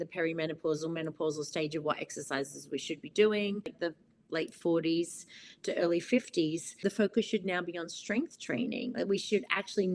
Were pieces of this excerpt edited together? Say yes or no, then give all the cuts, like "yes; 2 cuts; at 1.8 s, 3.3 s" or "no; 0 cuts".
yes; 2 cuts; at 3.9 s, 6.8 s